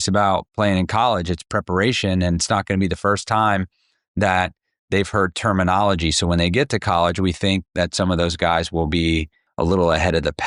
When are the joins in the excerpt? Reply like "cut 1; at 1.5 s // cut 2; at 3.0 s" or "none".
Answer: cut 1; at 9.4 s